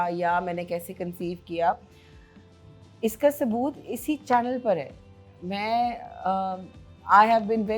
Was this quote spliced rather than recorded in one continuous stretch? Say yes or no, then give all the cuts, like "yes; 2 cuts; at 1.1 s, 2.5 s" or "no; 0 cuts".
no; 0 cuts